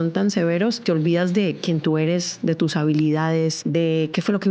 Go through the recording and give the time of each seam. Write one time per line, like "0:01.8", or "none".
0:00.8
0:03.6